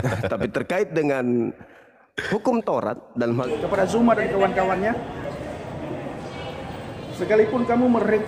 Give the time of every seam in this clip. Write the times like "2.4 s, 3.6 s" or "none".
3.5 s